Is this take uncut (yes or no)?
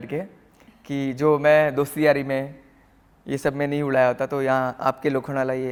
yes